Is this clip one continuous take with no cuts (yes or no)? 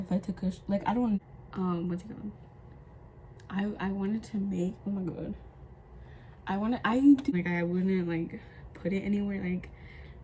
no